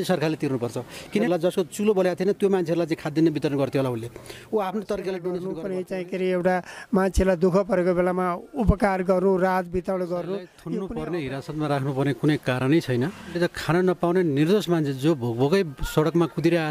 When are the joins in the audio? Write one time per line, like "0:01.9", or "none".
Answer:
0:01.2
0:05.5
0:10.5
0:13.3